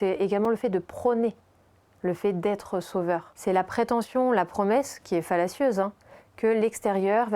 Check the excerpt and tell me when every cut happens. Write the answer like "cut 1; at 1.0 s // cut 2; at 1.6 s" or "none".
cut 1; at 3.3 s